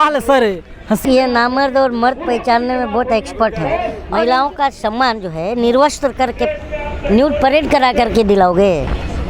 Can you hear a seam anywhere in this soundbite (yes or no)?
yes